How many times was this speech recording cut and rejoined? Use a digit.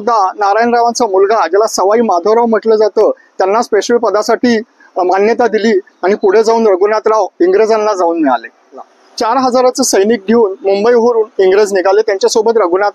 1